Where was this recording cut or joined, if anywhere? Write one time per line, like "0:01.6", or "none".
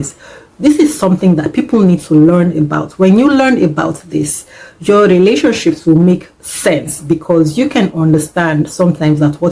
none